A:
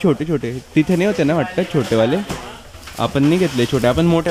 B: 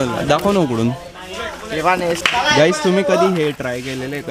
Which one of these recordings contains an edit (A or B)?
B